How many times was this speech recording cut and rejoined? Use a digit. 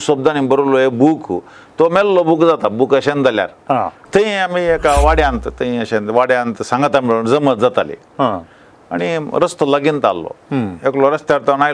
1